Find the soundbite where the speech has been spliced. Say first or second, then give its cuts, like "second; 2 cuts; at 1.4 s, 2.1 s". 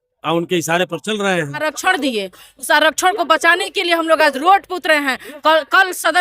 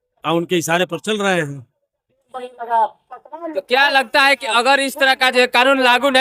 first; 1 cut; at 1.6 s